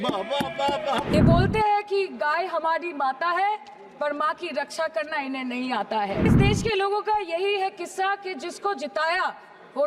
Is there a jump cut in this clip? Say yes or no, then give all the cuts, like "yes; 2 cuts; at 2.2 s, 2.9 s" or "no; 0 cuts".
yes; 2 cuts; at 1.1 s, 6.3 s